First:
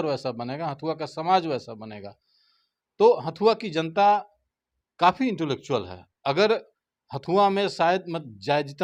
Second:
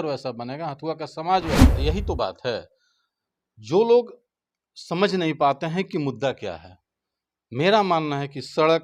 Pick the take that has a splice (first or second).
second